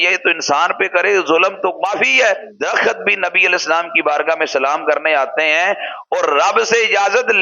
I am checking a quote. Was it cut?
yes; 1 cut; at 2.4 s

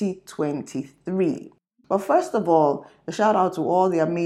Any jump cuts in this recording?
yes; 1 cut; at 1.5 s

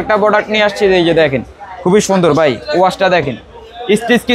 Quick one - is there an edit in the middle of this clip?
no; 0 cuts

